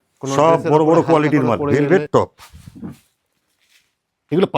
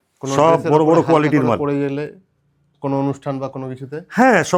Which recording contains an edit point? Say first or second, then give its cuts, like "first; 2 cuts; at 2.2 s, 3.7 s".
first; 1 cut; at 1.7 s